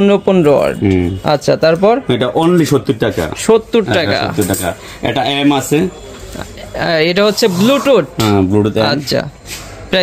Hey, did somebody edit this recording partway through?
no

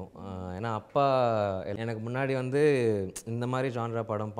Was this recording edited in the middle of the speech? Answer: yes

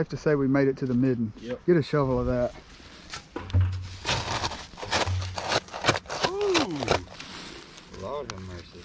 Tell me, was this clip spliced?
yes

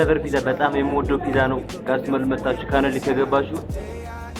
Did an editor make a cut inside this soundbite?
no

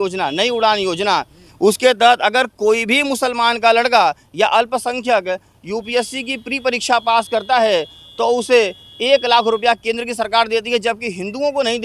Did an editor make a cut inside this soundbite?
no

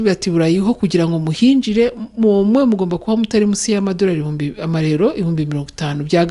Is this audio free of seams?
yes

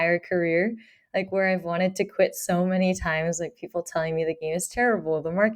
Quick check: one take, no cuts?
no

